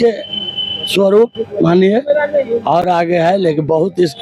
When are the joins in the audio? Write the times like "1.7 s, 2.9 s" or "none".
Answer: none